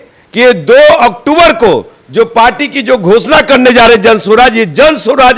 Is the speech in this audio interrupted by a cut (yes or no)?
no